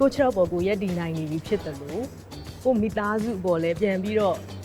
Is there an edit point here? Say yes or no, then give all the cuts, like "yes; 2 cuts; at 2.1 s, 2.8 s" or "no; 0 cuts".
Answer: no; 0 cuts